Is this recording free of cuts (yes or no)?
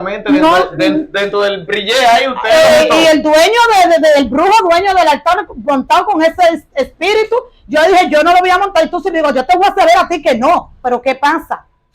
no